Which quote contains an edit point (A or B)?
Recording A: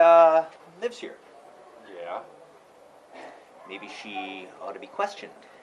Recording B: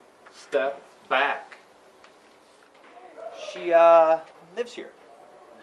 B